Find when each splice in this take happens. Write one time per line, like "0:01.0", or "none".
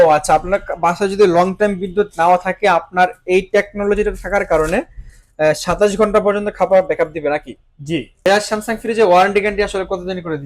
0:08.1